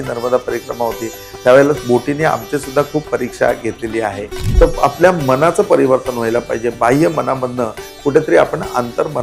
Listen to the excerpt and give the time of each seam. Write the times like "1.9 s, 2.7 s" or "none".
4.4 s